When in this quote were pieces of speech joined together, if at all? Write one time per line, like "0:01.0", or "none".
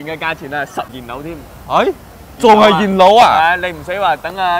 0:00.9